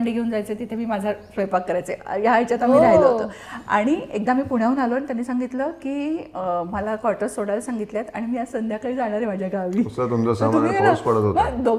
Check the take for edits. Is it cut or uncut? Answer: uncut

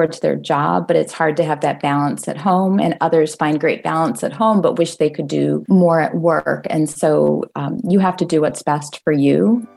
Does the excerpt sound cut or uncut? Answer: cut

